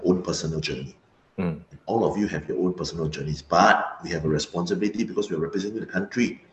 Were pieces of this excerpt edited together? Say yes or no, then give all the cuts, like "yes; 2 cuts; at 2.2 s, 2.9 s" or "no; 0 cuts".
no; 0 cuts